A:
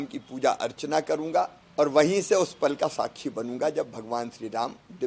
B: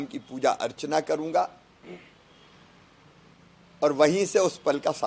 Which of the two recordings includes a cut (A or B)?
A